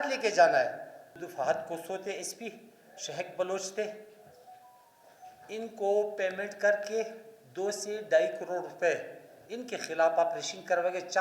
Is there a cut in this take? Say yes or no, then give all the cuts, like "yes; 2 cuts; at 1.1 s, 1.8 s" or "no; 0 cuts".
yes; 1 cut; at 1.2 s